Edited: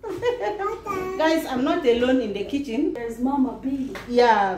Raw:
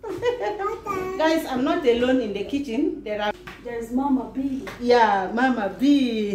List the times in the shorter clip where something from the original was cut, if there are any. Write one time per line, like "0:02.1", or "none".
0:03.0